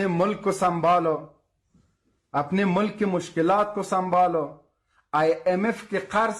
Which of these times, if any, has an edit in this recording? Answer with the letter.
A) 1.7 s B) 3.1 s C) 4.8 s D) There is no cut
D